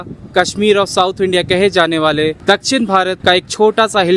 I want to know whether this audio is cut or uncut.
uncut